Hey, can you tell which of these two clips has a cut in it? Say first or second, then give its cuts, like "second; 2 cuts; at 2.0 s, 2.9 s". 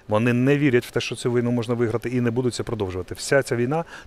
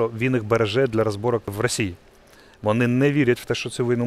second; 1 cut; at 1.5 s